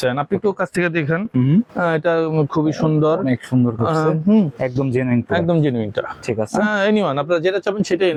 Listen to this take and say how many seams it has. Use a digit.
0